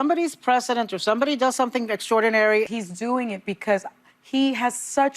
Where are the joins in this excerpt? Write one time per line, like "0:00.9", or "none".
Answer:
0:02.7